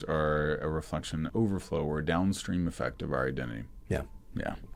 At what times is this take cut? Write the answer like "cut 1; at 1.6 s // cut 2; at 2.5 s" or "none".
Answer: none